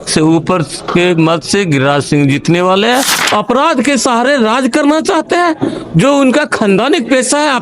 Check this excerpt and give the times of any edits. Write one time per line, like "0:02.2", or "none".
0:03.2

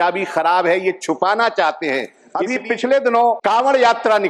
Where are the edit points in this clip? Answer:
0:02.2
0:03.4

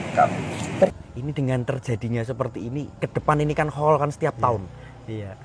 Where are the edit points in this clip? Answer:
0:00.9

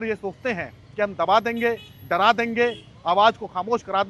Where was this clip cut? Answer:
none

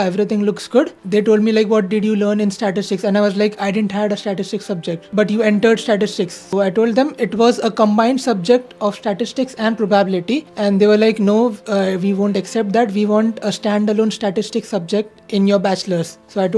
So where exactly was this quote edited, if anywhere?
0:01.0
0:05.1
0:06.4

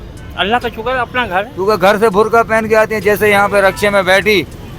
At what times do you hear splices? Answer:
0:01.5

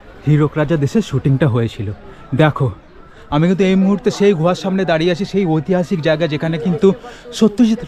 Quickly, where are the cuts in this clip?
0:03.0

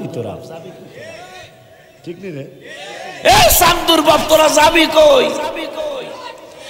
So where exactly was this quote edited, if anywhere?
none

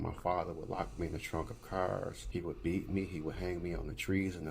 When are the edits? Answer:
0:02.2

